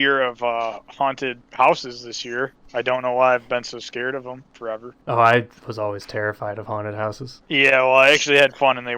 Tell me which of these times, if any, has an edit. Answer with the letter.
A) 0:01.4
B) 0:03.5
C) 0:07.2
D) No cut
A